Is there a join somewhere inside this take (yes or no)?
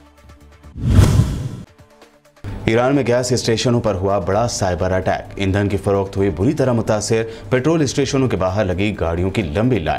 yes